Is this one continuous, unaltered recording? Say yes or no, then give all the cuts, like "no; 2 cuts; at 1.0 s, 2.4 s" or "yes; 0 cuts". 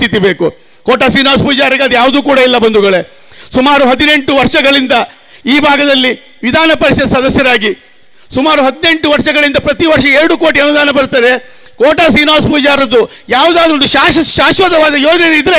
yes; 0 cuts